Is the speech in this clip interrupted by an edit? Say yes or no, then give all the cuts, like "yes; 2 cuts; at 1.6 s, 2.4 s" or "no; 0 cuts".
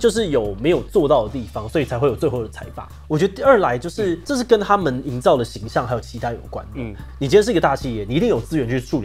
yes; 3 cuts; at 2.9 s, 4.2 s, 7.0 s